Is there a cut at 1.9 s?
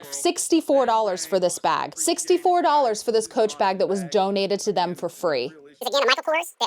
yes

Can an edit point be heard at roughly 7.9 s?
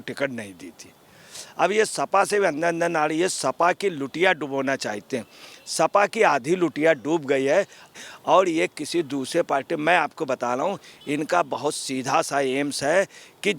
yes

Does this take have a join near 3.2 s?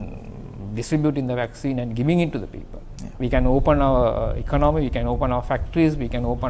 yes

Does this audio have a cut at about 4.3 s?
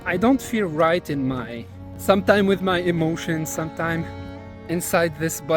no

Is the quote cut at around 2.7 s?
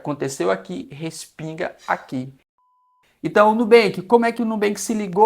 yes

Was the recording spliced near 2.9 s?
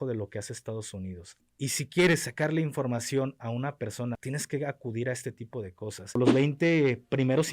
no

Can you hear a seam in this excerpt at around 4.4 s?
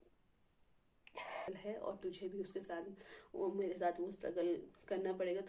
no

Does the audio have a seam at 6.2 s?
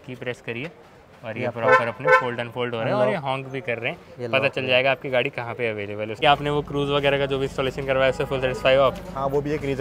yes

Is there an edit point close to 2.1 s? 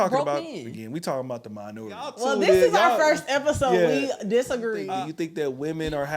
yes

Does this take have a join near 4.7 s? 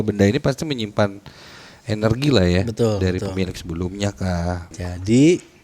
yes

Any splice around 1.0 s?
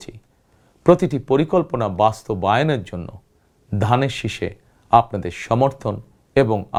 no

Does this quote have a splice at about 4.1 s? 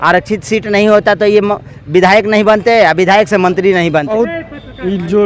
yes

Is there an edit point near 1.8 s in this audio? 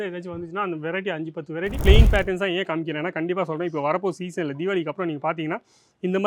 yes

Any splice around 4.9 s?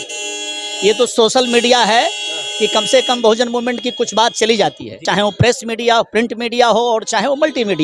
yes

